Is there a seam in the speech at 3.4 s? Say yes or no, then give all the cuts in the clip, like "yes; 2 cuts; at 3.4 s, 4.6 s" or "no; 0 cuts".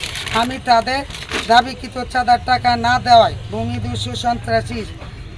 no; 0 cuts